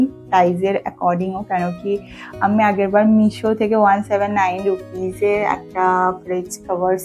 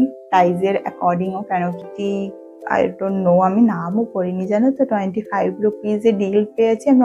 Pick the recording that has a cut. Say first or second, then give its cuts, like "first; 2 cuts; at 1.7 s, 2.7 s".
second; 1 cut; at 1.8 s